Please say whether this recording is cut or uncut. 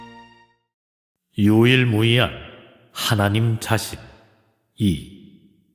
uncut